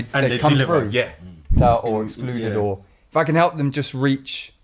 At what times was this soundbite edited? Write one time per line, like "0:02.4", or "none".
0:01.5